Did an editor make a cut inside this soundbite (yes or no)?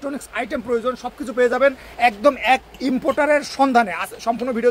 no